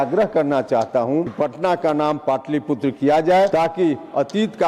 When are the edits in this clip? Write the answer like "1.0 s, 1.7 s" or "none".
1.3 s, 3.5 s